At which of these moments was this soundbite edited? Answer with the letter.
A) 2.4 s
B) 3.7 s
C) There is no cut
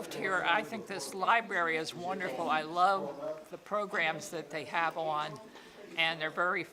C